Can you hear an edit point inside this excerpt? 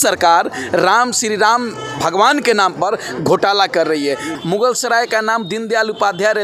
yes; 1 cut; at 4.3 s

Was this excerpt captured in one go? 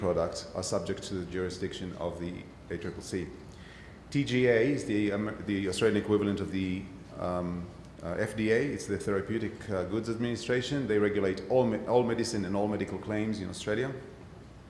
no; 1 cut; at 3.8 s

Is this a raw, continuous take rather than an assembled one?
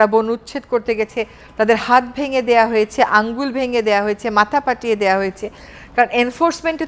yes; 0 cuts

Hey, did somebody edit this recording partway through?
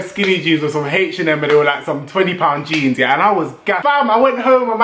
yes; 1 cut; at 3.8 s

